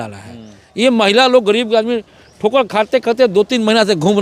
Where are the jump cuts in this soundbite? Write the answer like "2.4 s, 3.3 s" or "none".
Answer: none